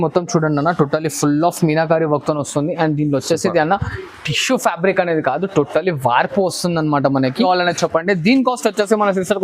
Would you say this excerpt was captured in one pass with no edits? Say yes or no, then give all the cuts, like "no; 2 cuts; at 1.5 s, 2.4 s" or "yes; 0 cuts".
no; 1 cut; at 7.5 s